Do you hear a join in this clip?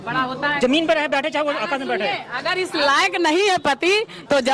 no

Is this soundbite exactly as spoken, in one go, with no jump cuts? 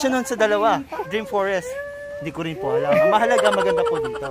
no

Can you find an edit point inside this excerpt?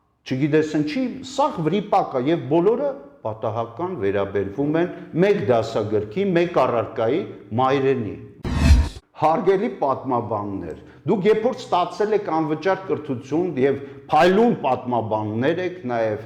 yes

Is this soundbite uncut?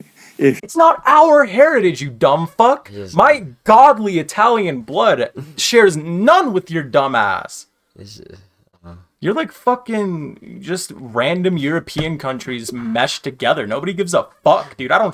yes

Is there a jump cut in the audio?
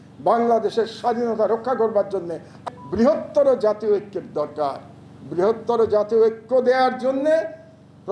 yes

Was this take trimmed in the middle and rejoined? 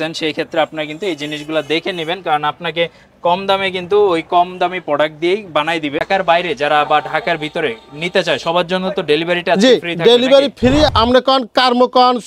yes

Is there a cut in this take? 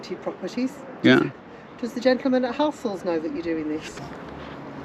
yes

